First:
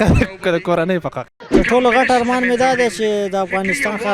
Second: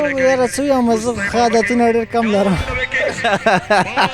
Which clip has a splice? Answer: first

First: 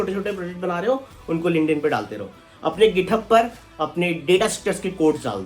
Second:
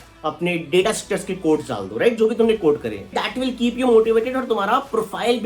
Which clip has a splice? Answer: second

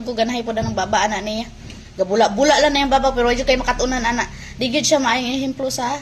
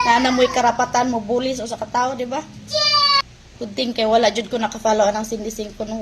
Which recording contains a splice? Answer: second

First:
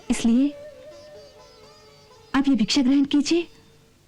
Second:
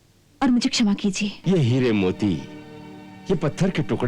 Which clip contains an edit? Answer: second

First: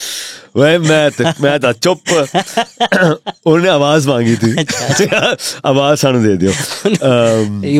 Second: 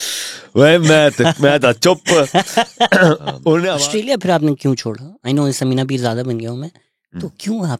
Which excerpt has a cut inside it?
second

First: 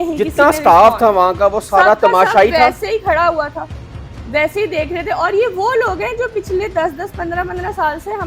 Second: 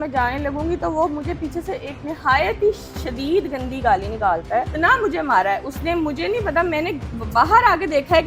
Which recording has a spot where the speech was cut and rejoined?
second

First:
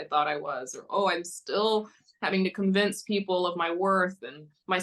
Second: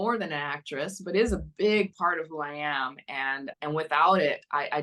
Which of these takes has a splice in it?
second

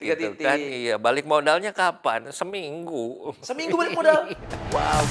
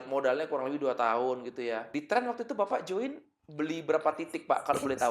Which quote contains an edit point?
second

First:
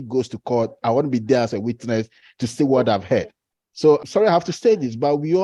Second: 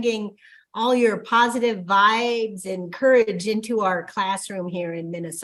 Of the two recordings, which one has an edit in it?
first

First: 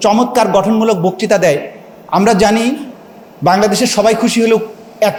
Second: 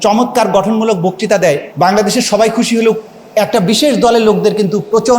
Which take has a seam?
second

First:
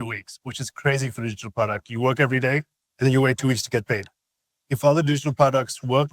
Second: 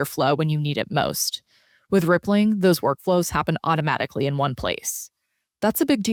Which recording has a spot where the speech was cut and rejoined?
first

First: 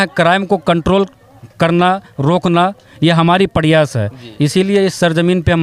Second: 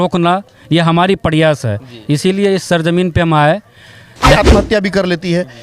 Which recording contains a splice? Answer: second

